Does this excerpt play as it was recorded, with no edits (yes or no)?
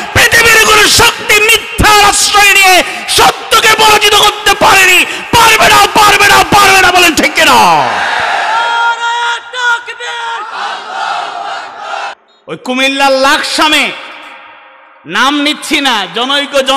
no